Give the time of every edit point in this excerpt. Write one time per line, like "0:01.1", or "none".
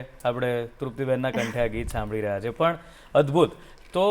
none